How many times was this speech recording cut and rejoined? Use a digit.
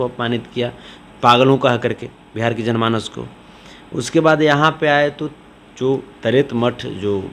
0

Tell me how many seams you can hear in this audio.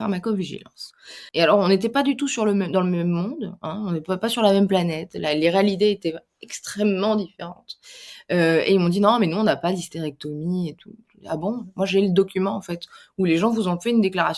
1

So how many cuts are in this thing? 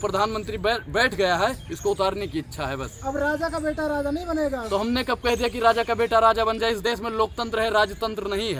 0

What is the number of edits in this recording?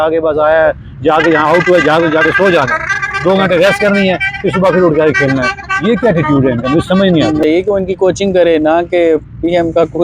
1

